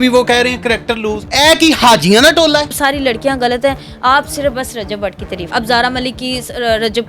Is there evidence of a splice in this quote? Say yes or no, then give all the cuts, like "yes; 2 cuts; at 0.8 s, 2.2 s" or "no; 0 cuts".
yes; 3 cuts; at 1.2 s, 2.7 s, 5.5 s